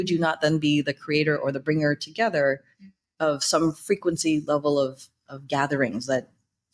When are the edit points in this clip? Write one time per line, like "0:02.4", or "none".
none